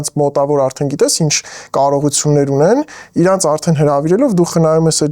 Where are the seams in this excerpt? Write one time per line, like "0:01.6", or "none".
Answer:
none